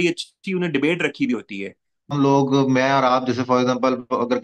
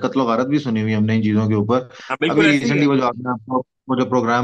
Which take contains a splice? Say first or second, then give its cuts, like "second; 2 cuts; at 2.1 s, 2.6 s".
first; 1 cut; at 2.1 s